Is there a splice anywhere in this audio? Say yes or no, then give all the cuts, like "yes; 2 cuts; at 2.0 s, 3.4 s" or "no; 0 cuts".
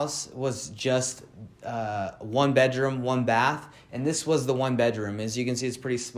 no; 0 cuts